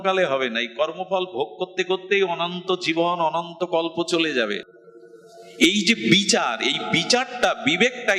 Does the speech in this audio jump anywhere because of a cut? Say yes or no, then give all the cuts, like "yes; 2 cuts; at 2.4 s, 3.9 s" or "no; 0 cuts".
yes; 1 cut; at 4.8 s